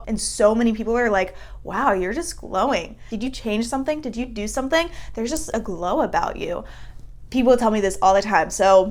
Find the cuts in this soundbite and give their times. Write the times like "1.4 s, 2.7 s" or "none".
none